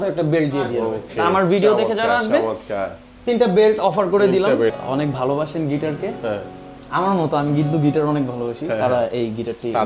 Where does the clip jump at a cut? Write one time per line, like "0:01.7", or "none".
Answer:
0:04.7